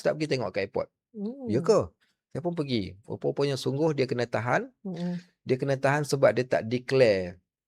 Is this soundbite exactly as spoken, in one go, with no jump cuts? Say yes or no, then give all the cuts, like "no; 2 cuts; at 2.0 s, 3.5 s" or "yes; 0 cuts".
yes; 0 cuts